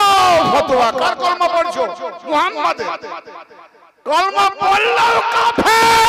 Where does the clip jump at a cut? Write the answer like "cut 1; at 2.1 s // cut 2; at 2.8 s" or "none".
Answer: none